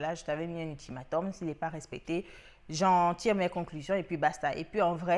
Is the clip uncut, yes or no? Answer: yes